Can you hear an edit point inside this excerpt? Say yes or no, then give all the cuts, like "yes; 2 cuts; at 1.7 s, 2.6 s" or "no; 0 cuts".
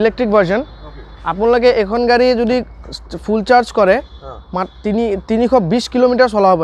no; 0 cuts